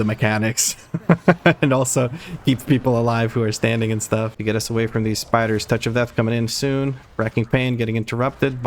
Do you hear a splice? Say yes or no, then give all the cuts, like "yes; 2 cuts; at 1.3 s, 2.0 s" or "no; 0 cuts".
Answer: yes; 1 cut; at 4.3 s